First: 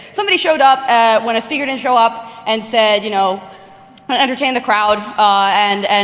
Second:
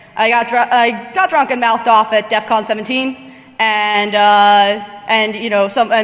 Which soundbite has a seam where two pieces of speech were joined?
first; 1 cut; at 2.9 s

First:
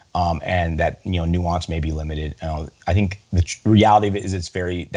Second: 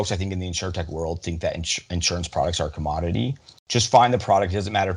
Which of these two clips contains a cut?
second; 1 cut; at 3.5 s

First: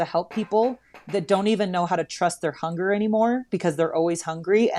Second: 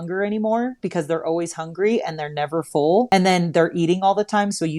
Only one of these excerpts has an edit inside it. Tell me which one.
second; 1 cut; at 3.1 s

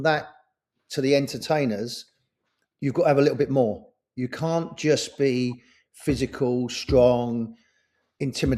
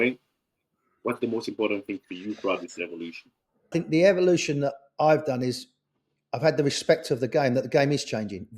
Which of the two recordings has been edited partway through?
second; 1 cut; at 3.7 s

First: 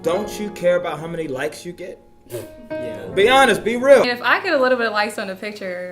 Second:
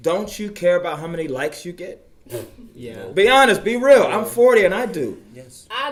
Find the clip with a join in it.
first; 1 cut; at 4.1 s

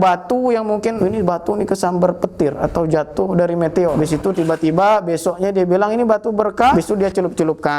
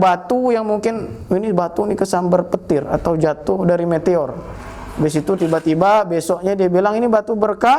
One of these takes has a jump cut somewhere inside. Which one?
first; 3 cuts; at 1.0 s, 3.9 s, 6.7 s

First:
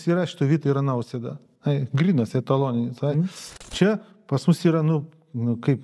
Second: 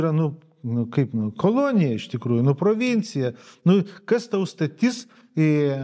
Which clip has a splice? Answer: first; 1 cut; at 3.5 s

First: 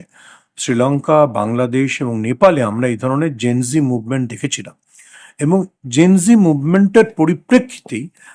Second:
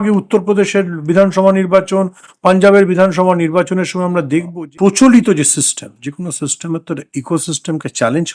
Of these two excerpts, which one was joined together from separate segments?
second; 1 cut; at 4.5 s

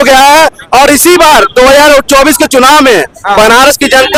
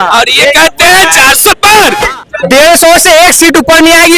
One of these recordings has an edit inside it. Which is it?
second; 1 cut; at 2.1 s

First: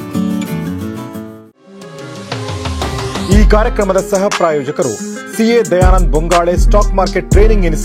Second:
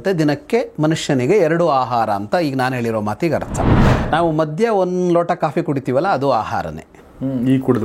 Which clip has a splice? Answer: second; 1 cut; at 3.9 s

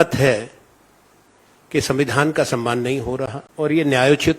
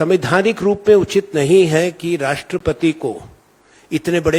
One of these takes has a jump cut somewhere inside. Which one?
first; 1 cut; at 3.4 s

